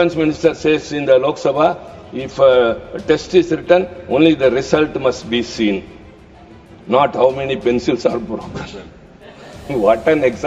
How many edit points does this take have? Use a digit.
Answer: 0